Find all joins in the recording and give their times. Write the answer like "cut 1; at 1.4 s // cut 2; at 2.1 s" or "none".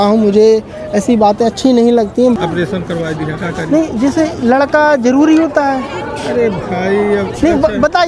cut 1; at 2.4 s